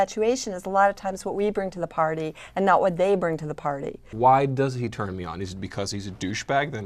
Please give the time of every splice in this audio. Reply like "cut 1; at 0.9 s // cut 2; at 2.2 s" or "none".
cut 1; at 4.0 s